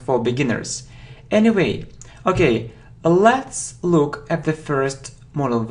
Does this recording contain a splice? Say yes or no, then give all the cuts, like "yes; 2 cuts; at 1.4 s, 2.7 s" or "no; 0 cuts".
yes; 1 cut; at 3.9 s